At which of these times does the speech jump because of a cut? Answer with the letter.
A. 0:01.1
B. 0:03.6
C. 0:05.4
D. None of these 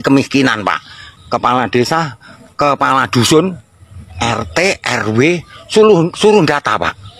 A